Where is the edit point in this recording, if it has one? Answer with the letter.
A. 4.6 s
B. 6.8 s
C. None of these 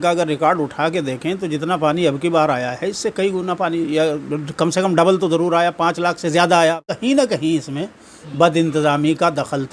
B